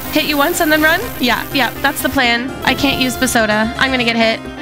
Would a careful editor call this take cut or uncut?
cut